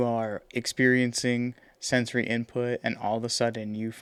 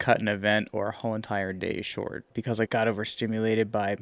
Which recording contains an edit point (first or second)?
second